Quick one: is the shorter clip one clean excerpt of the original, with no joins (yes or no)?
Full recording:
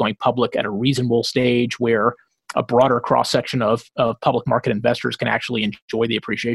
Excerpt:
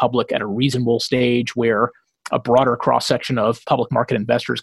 no